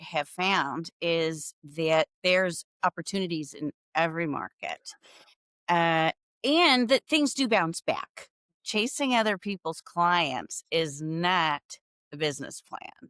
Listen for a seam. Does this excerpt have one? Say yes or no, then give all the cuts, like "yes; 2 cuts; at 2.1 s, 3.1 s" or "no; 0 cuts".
yes; 1 cut; at 8.6 s